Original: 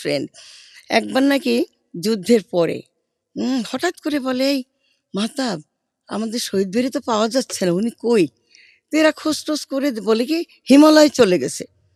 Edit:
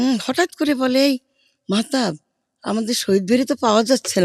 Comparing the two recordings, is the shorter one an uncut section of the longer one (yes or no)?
yes